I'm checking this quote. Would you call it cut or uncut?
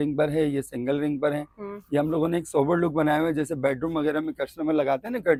uncut